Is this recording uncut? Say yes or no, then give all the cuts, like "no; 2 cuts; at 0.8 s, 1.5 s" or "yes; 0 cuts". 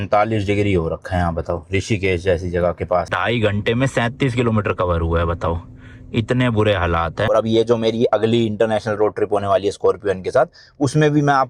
no; 2 cuts; at 3.1 s, 7.3 s